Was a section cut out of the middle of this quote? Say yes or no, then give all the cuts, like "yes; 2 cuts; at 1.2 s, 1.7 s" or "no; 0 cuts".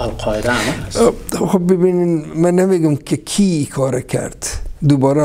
no; 0 cuts